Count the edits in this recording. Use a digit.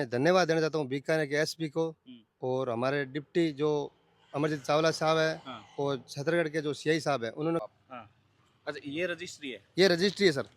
1